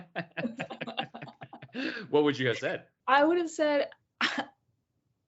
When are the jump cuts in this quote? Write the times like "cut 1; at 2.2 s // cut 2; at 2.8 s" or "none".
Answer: cut 1; at 2.9 s